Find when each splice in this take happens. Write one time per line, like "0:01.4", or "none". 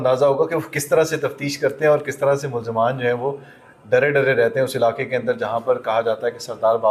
none